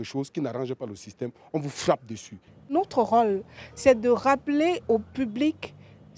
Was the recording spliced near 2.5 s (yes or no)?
yes